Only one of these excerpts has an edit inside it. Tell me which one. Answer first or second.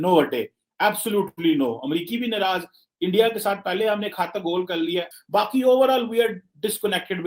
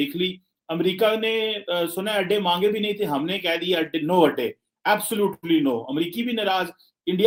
first